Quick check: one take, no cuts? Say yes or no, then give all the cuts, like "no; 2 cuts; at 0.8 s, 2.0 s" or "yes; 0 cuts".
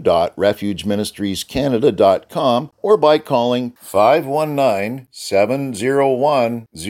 no; 1 cut; at 2.7 s